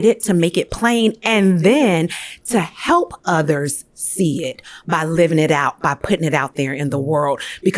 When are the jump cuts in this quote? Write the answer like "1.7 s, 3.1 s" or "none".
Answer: none